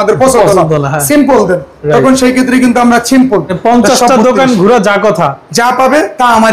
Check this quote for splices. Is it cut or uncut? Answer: cut